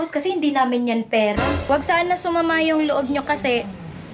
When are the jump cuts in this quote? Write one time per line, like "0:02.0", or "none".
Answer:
0:01.6

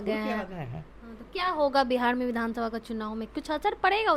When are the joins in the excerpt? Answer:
none

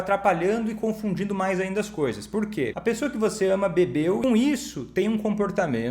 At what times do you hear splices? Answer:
0:02.7
0:04.2

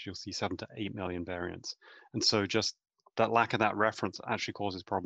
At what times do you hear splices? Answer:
none

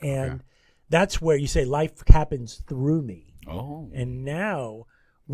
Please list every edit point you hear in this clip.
none

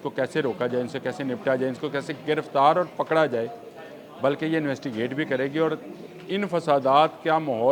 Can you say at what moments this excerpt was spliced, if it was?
none

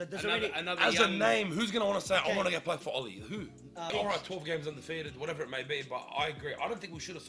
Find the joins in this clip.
0:03.9

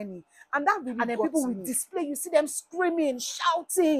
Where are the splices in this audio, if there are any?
0:01.1

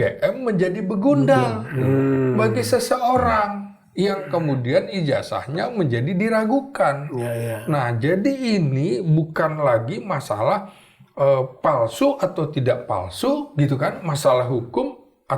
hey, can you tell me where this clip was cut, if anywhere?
none

